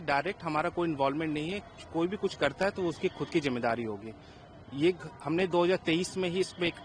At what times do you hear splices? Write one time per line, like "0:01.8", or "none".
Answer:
none